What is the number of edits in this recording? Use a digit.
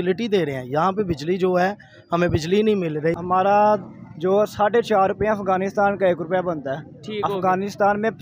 1